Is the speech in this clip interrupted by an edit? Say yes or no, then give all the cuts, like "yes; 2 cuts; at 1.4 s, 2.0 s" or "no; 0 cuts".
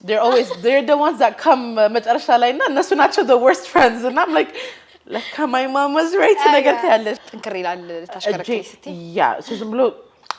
yes; 1 cut; at 7.2 s